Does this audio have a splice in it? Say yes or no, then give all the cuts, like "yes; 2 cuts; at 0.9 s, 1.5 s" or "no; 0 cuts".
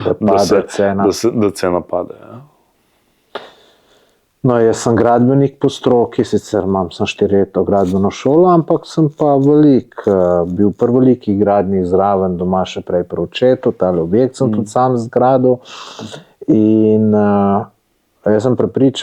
no; 0 cuts